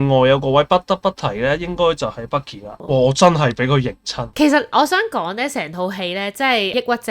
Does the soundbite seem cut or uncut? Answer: cut